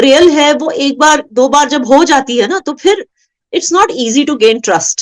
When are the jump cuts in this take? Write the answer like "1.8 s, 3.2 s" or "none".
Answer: none